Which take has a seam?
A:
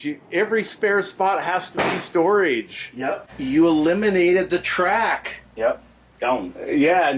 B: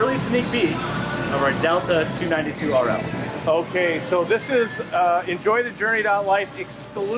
A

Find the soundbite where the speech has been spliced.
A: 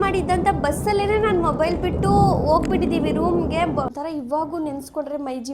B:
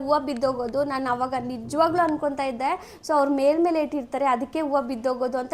A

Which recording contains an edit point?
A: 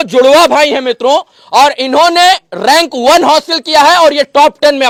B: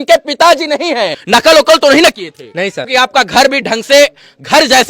B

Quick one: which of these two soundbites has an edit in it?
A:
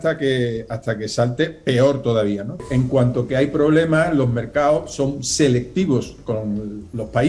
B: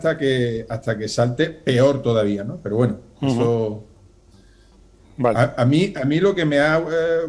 A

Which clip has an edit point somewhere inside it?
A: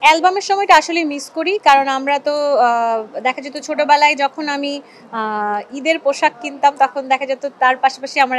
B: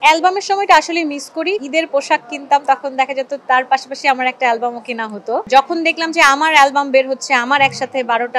B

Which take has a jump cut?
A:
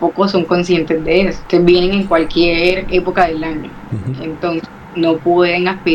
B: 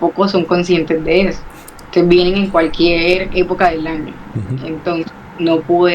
A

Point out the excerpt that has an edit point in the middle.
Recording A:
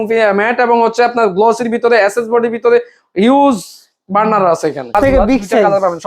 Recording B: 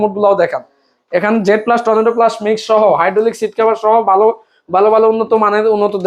A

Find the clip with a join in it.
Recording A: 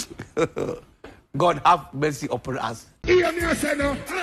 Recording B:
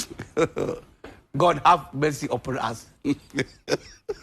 B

